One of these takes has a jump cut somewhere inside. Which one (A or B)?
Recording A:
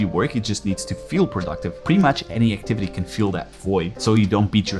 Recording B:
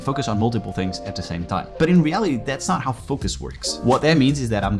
B